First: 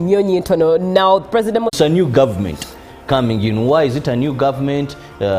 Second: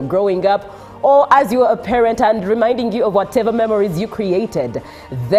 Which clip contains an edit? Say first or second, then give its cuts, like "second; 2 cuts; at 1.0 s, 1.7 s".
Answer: first; 1 cut; at 1.7 s